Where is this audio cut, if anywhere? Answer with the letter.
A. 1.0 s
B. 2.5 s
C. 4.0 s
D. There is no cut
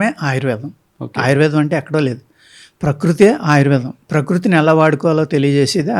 D